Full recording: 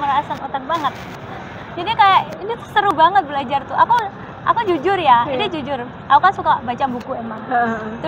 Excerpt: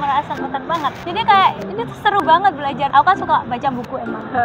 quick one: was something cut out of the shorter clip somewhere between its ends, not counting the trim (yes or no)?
yes